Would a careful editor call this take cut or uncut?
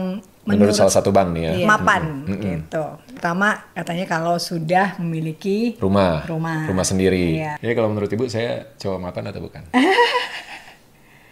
cut